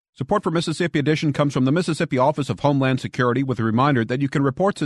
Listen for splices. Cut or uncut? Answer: uncut